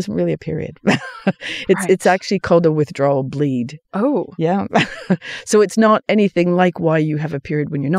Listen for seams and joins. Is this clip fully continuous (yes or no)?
yes